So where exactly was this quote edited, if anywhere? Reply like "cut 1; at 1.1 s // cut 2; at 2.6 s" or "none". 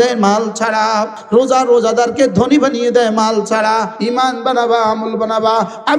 cut 1; at 1.2 s // cut 2; at 3.9 s